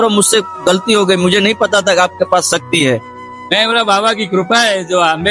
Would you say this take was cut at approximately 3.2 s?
yes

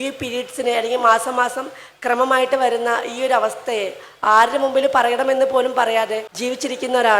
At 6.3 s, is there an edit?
yes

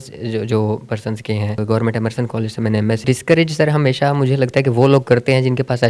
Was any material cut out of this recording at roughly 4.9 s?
no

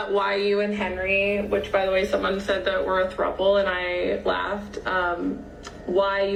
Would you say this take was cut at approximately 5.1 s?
no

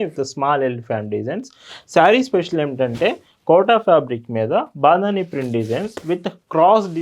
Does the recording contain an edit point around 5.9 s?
yes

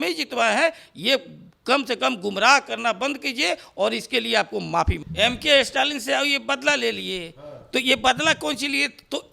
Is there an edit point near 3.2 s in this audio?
no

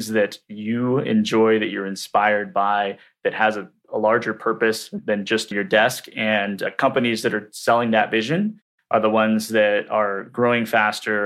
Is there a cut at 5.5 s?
yes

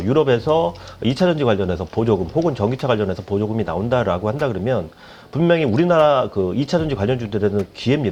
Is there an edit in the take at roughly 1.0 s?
no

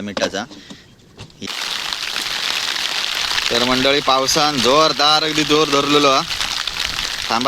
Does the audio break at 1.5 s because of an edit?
yes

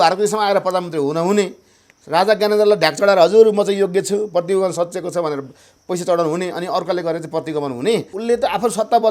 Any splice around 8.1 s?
yes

